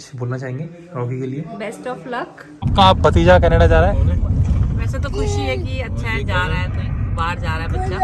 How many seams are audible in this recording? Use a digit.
1